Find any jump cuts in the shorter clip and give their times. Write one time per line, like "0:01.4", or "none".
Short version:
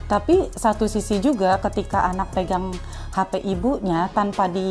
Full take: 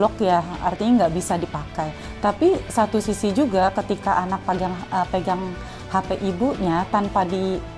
0:02.3